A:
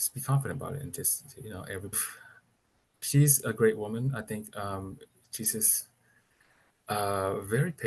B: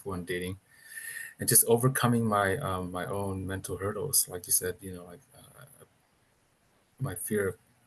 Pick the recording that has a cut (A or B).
A